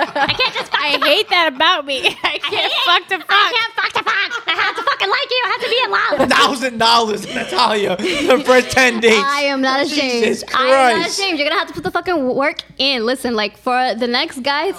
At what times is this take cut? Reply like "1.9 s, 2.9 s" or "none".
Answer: 6.2 s